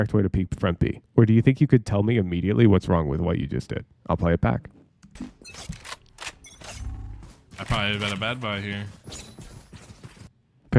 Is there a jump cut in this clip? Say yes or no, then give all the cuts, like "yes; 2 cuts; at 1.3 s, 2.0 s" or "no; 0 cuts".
no; 0 cuts